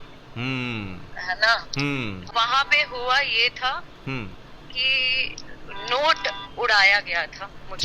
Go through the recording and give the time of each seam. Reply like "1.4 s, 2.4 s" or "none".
2.3 s